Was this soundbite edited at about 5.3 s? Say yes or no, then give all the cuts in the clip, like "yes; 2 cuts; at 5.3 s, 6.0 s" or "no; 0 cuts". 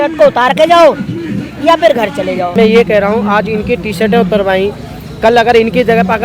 no; 1 cut; at 2.5 s